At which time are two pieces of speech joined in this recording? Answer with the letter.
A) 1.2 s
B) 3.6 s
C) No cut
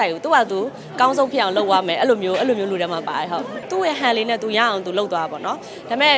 B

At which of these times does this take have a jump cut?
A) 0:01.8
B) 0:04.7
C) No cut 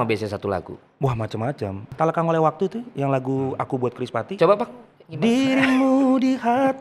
A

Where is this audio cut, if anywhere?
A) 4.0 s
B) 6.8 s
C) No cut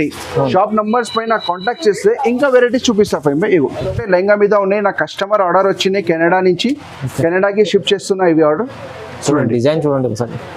A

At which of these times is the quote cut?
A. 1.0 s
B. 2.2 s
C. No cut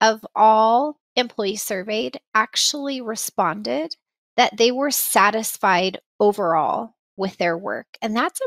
A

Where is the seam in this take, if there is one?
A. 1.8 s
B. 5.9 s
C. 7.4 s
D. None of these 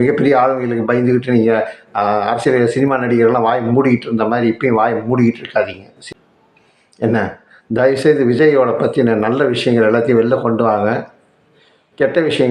B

